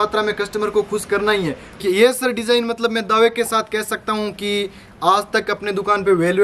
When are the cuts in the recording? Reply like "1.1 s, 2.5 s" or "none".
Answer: 1.8 s